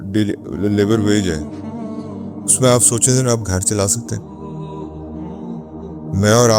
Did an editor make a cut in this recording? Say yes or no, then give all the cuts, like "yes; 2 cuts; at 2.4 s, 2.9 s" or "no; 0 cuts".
yes; 4 cuts; at 1.4 s, 2.6 s, 4.0 s, 5.4 s